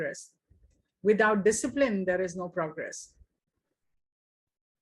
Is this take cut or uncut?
uncut